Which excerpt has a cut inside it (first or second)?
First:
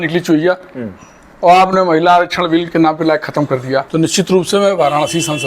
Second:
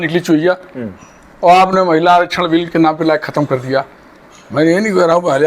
first